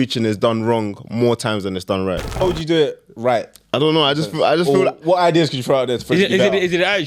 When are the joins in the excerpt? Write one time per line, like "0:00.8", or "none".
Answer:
0:02.4